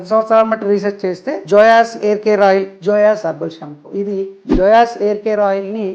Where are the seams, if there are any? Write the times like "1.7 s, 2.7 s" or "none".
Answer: 1.3 s, 2.7 s, 4.4 s